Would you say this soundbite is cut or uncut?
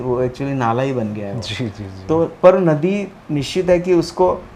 uncut